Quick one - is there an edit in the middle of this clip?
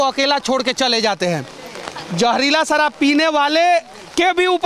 no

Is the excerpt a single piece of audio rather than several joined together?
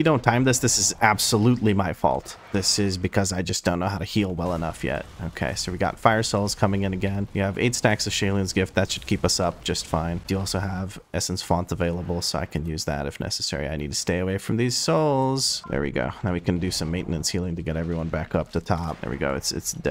yes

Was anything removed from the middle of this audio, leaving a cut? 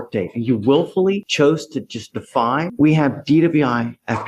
yes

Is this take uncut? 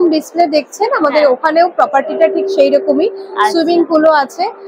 yes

